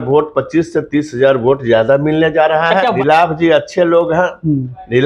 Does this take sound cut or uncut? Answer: cut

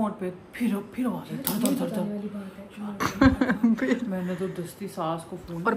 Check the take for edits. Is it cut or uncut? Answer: cut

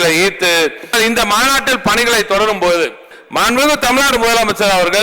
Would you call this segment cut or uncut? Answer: cut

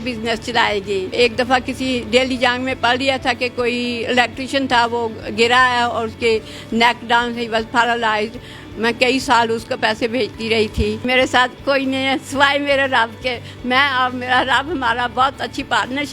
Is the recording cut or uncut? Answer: cut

